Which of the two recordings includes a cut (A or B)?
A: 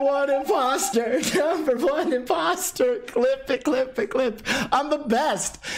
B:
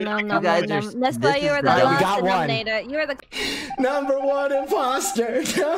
B